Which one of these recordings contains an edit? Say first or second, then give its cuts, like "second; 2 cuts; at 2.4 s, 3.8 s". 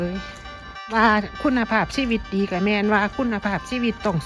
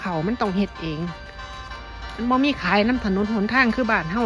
first; 1 cut; at 1.0 s